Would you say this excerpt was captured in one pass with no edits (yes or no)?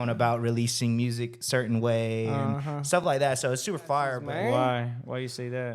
no